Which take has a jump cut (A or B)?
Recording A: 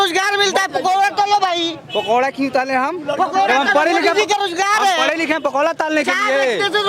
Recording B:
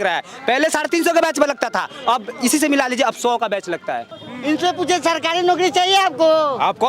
B